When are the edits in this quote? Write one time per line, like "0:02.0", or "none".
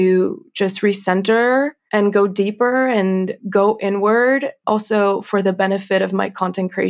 0:01.8
0:03.4
0:04.6

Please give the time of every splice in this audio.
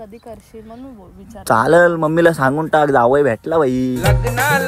none

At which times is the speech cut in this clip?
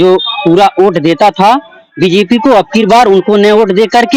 none

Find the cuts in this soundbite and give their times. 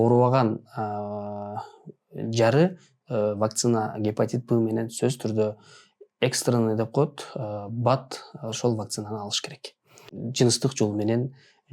0:10.1

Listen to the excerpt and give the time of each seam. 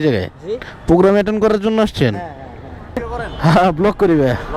0:03.1

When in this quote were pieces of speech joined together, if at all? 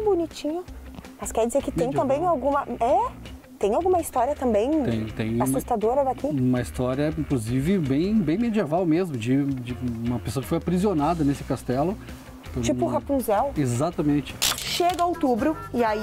0:14.5

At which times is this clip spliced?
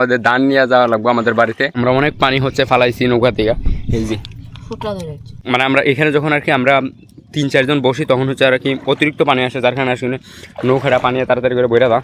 0:01.7
0:05.3

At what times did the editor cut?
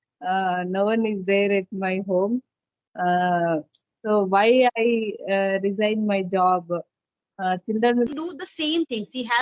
0:08.1

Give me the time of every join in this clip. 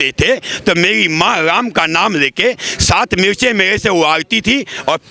none

